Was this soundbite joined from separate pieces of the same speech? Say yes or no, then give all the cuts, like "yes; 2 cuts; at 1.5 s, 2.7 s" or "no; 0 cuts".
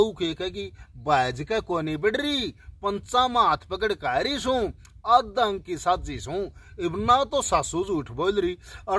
no; 0 cuts